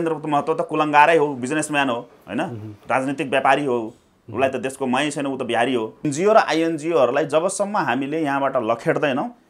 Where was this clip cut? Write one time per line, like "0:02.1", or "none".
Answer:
0:06.0